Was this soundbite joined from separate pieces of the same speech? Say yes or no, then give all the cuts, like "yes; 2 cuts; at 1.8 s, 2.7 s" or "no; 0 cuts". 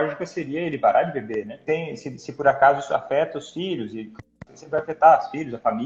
yes; 1 cut; at 1.5 s